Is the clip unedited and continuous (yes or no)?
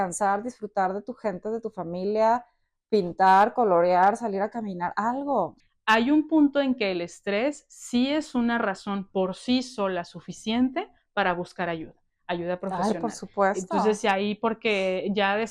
no